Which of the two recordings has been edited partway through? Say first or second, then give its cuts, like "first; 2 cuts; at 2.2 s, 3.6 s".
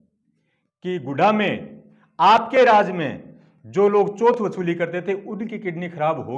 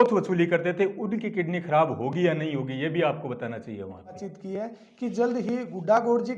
second; 1 cut; at 4.3 s